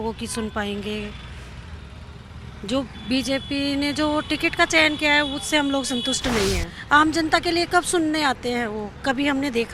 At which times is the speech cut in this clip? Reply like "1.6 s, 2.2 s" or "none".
6.7 s